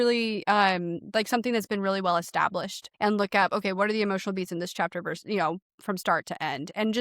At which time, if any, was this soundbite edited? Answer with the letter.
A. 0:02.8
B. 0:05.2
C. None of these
A